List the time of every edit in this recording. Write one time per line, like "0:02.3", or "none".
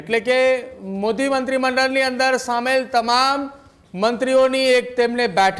none